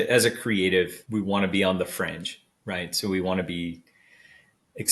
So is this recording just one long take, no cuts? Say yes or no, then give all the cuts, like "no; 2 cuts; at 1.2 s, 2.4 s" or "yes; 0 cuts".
no; 1 cut; at 1.0 s